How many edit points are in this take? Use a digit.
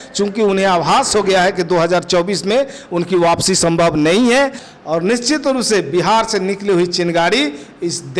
1